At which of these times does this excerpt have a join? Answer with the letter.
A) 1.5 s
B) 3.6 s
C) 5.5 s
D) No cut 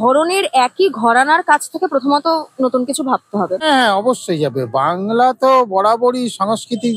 B